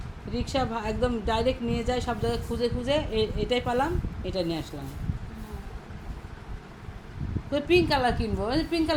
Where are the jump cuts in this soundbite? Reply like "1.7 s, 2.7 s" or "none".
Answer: none